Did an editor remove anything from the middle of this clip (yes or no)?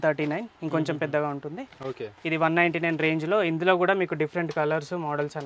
no